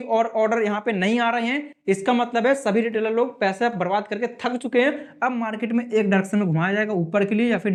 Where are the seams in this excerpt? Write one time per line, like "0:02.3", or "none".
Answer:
none